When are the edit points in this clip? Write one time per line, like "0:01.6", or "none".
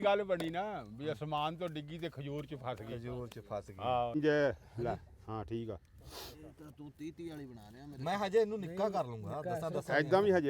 0:04.1